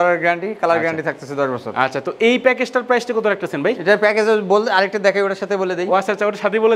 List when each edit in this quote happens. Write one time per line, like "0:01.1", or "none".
none